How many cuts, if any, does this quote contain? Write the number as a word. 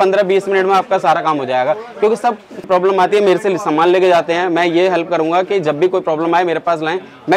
one